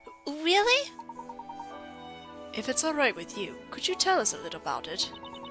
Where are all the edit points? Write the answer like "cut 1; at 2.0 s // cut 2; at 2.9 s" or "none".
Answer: none